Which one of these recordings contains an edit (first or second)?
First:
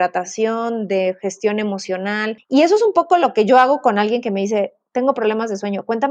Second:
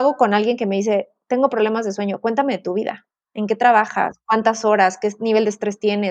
first